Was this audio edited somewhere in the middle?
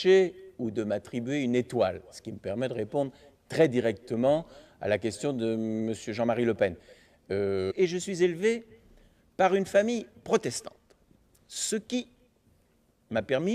no; 0 cuts

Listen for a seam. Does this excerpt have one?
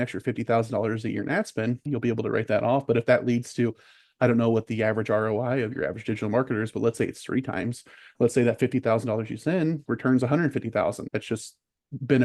yes; 3 cuts; at 1.8 s, 9.8 s, 11.0 s

